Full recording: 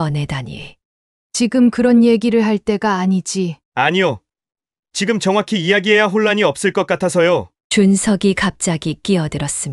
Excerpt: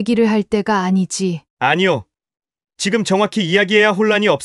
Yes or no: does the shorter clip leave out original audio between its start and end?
no